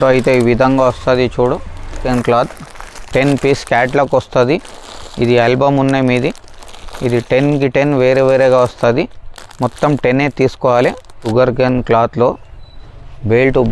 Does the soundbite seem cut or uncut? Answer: cut